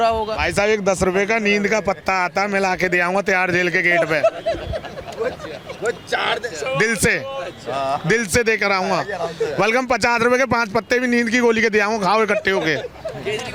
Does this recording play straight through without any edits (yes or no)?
yes